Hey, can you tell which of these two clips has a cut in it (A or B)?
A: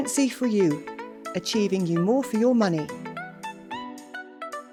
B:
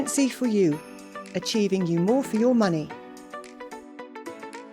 B